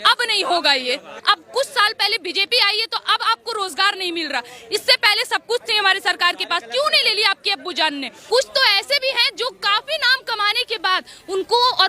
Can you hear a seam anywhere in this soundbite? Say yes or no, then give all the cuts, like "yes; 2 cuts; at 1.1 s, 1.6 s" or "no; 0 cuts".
yes; 2 cuts; at 1.1 s, 8.2 s